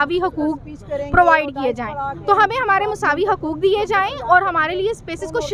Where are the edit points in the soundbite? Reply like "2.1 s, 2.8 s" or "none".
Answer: none